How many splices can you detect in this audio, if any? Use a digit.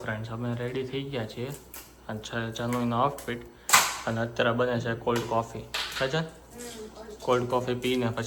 0